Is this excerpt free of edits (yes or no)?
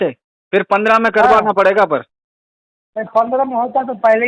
yes